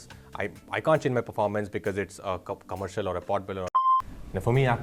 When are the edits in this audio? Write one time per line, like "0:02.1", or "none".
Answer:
0:03.7